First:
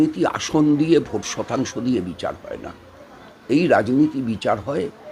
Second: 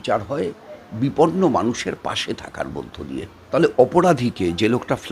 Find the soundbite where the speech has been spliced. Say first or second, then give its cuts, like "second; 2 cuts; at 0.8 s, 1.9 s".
second; 1 cut; at 3.4 s